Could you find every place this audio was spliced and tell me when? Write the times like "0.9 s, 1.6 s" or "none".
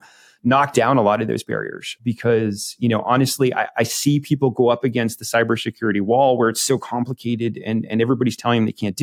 2.0 s